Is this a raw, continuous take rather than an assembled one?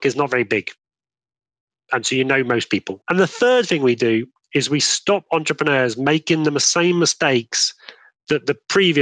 no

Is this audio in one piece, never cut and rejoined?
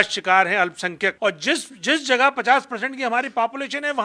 no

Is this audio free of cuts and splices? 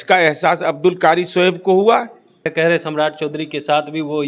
no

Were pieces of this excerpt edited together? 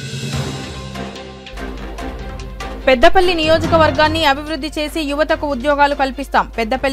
yes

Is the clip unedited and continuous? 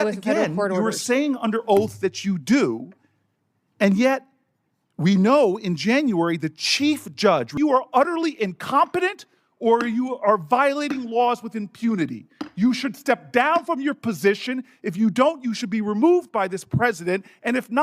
no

